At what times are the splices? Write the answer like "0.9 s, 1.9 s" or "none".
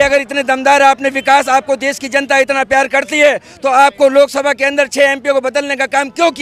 none